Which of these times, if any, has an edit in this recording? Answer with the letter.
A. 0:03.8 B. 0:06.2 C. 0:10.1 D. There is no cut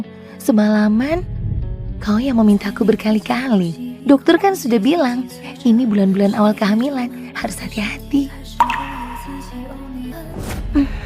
C